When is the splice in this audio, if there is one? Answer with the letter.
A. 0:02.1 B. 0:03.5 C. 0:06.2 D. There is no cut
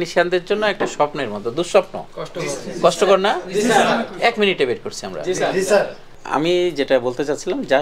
C